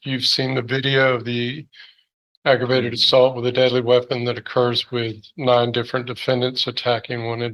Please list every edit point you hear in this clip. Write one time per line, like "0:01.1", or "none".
none

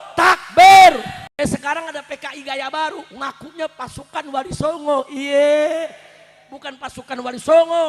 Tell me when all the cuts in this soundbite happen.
0:01.2

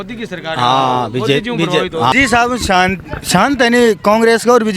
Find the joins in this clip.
0:02.1

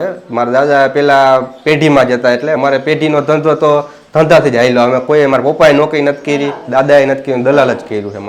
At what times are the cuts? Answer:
none

